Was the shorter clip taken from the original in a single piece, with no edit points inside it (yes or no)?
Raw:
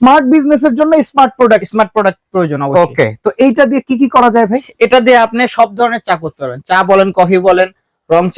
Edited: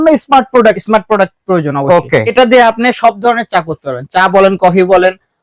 no